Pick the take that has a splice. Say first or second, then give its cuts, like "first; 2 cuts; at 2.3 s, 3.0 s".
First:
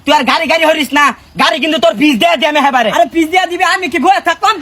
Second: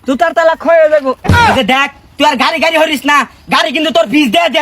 second; 1 cut; at 1.2 s